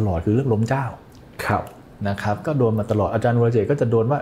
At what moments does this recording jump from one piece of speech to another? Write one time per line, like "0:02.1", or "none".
none